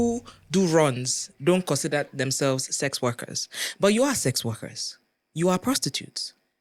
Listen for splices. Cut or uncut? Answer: uncut